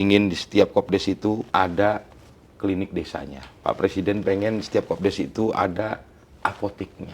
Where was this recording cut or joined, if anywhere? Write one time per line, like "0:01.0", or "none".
0:01.4
0:03.4